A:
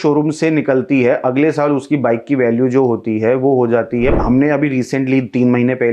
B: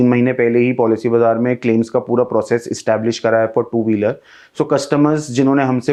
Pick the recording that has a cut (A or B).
A